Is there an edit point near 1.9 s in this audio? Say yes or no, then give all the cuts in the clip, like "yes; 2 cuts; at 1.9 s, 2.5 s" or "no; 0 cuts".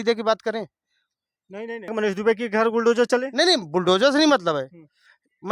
yes; 1 cut; at 1.9 s